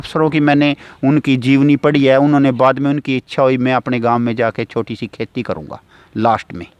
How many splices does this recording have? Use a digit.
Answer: 0